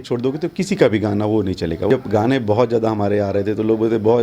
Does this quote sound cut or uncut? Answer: cut